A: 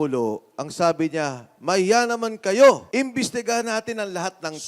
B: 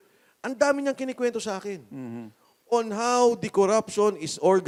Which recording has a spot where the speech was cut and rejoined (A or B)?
A